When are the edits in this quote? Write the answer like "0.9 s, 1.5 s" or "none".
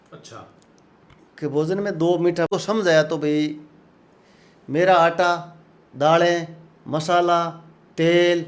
2.5 s